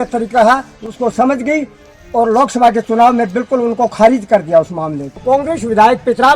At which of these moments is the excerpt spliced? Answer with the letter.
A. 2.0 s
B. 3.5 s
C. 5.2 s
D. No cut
C